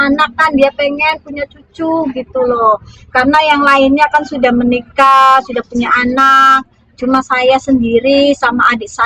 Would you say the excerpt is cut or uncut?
uncut